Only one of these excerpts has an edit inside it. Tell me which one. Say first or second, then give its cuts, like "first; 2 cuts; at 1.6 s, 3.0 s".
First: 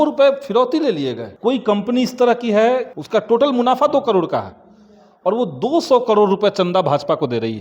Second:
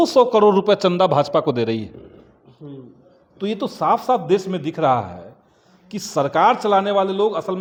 first; 2 cuts; at 1.3 s, 2.9 s